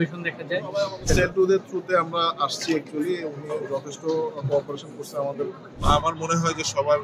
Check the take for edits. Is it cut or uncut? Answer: cut